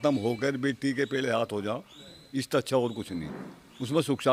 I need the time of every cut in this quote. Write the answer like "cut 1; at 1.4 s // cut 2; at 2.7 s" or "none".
none